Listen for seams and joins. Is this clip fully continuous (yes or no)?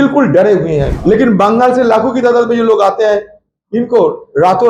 no